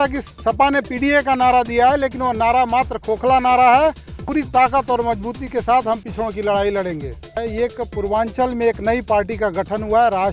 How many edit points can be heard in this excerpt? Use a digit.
2